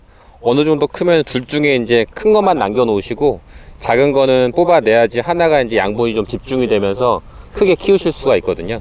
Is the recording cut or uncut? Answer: uncut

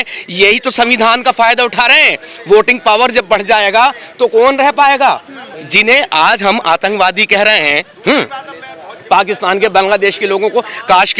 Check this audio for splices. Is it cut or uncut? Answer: uncut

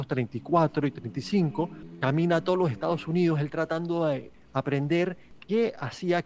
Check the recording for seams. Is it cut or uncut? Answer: cut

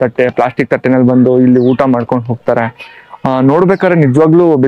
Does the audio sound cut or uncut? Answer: uncut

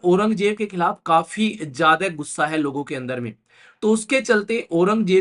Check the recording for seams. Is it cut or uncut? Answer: uncut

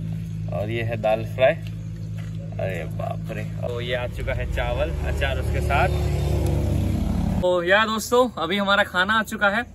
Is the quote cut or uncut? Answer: cut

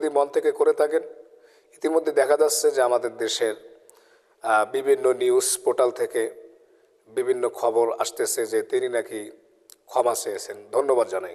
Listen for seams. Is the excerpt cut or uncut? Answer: uncut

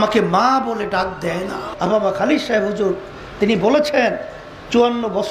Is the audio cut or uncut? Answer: cut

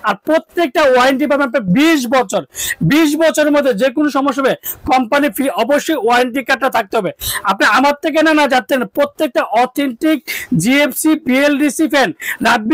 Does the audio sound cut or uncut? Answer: uncut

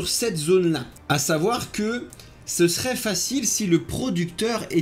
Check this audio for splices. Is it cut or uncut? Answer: uncut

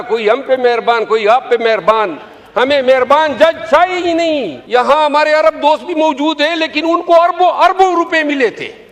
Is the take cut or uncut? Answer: cut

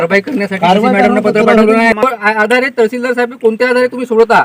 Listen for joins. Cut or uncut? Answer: cut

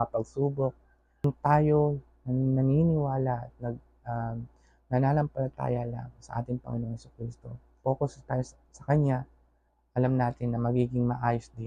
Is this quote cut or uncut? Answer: cut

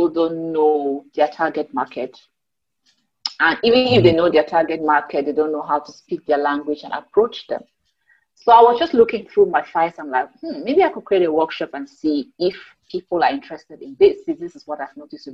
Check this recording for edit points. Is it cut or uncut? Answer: uncut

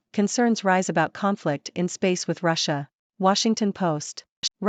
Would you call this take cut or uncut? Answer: uncut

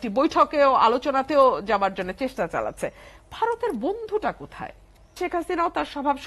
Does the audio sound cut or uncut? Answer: cut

